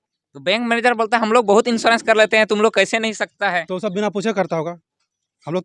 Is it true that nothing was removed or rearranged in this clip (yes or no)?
yes